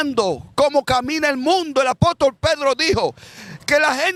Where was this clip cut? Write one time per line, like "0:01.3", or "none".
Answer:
none